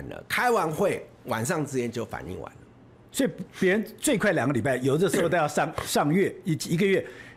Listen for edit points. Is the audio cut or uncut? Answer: uncut